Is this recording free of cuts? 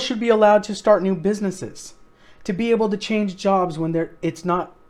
yes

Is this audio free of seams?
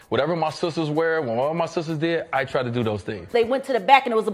no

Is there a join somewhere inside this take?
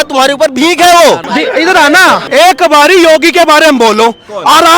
yes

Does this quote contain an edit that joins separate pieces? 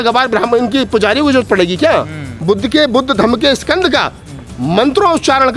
yes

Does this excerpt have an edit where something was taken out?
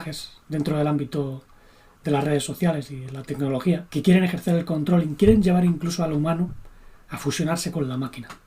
yes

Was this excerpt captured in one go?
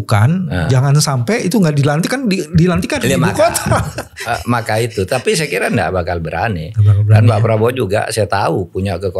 yes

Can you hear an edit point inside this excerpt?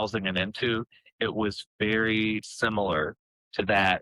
no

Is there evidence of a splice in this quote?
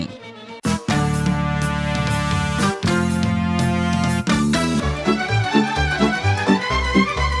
no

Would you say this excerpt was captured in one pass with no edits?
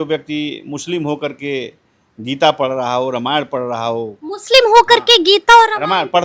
yes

